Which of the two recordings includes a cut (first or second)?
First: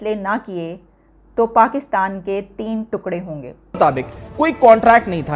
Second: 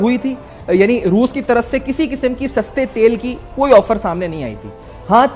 first